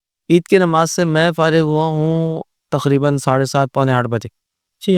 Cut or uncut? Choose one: uncut